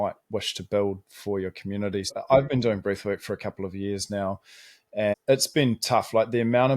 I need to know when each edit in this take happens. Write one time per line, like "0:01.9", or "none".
0:02.1
0:05.1